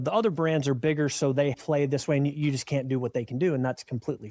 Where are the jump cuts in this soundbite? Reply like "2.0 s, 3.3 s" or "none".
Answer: 1.6 s